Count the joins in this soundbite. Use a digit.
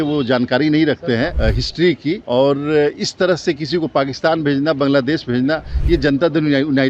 1